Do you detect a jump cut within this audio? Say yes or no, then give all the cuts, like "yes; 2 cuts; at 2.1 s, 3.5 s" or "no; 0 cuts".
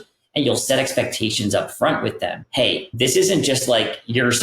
yes; 1 cut; at 2.8 s